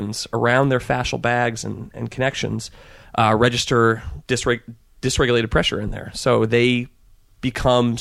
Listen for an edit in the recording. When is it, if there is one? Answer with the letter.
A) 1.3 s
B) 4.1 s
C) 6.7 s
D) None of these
D